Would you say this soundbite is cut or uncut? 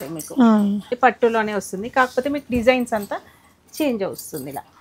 cut